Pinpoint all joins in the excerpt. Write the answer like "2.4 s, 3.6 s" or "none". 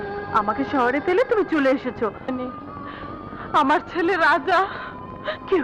2.3 s